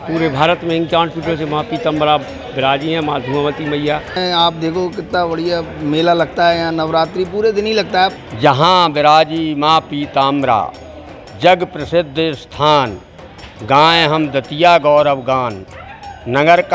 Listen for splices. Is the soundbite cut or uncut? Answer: cut